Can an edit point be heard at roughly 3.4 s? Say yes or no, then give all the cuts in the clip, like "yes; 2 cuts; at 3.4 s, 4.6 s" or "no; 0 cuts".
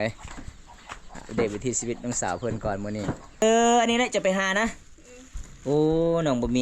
yes; 1 cut; at 3.4 s